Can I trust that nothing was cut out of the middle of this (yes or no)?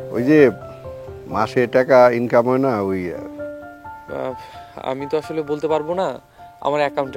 yes